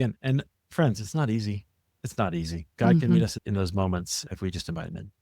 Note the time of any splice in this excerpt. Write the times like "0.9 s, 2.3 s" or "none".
2.7 s